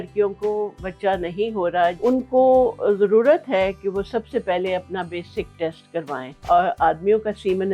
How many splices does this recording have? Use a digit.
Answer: 2